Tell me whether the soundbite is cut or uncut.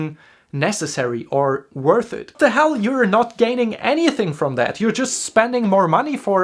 cut